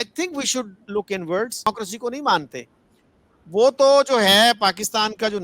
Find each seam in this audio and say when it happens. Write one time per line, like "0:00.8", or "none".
0:01.7

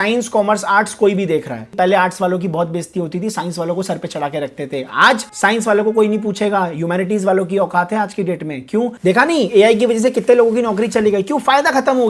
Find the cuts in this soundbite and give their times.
0:01.6
0:05.3
0:09.0

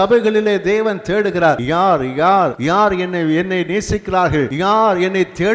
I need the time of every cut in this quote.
0:01.6
0:02.6
0:04.5

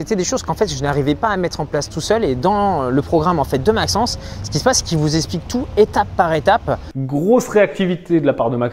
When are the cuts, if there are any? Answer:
0:06.9

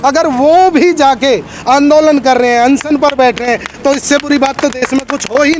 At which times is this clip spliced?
none

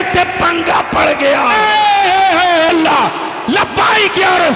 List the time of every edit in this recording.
0:02.7

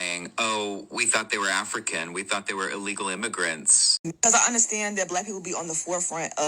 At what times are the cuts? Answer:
0:04.0

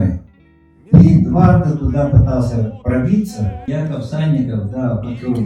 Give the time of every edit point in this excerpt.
0:03.6

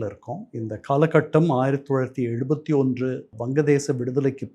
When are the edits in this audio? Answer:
0:03.3

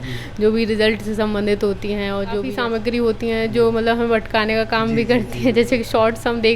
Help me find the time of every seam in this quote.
0:02.5

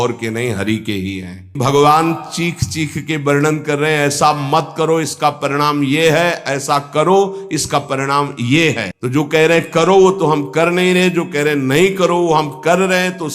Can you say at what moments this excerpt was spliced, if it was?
0:01.5
0:08.9

